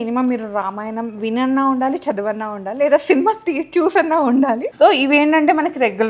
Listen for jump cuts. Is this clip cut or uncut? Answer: cut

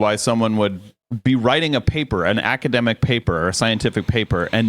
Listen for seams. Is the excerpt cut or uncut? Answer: uncut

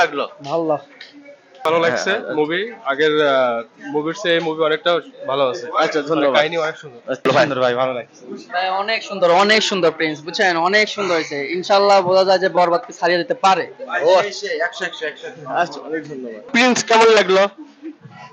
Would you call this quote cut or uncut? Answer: cut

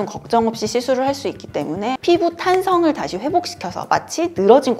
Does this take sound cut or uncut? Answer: cut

